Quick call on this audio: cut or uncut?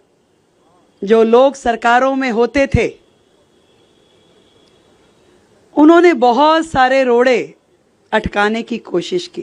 uncut